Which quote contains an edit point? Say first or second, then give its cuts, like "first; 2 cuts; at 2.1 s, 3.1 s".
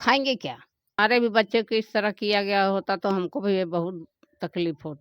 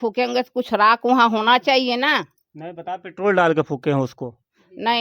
first; 1 cut; at 1.0 s